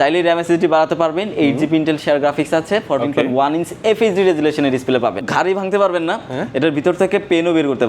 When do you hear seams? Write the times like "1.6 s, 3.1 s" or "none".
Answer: 5.3 s